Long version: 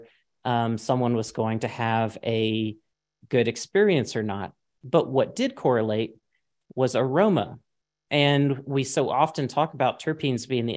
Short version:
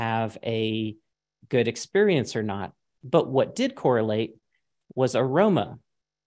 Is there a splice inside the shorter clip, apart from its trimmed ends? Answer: no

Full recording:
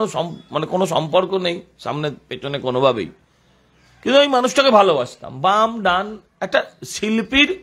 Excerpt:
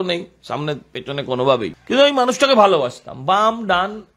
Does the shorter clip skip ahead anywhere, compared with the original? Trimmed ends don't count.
yes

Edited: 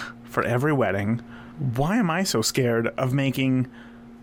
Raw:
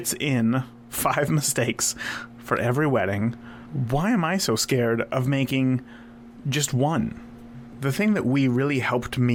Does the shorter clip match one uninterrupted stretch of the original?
yes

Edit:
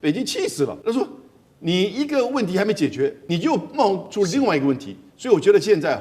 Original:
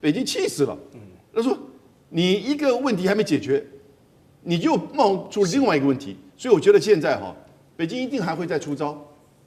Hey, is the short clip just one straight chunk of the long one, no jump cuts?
no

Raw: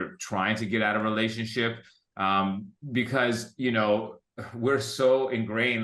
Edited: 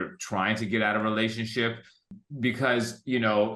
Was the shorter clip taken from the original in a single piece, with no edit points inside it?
no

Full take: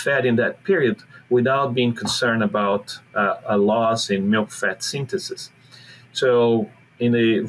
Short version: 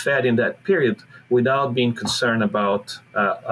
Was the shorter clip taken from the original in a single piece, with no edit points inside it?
yes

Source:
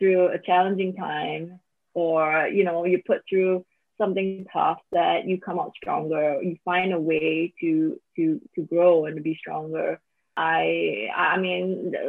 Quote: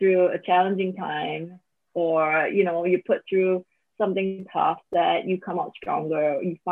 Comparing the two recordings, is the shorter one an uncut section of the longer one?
yes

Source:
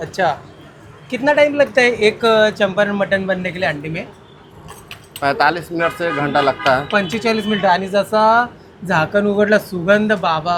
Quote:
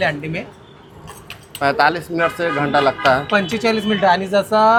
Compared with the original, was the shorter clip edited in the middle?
no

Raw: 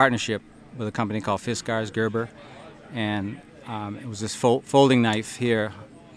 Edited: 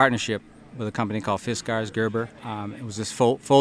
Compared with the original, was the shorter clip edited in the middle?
yes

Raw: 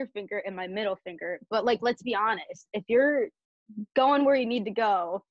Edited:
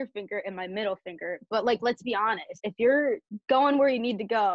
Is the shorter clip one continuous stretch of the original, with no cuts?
no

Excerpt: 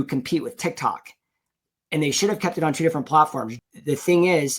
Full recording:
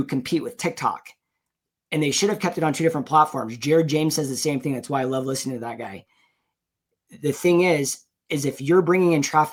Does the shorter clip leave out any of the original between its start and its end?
yes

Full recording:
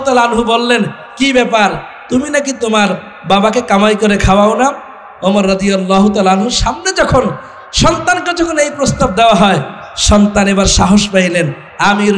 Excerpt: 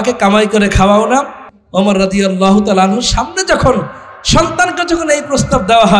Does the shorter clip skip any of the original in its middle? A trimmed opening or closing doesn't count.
no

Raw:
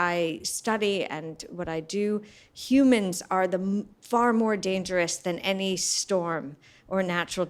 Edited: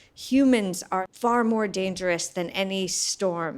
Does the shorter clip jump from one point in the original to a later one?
yes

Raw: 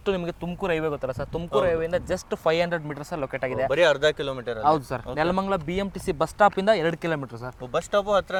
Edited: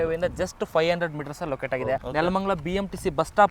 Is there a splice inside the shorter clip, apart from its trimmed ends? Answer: yes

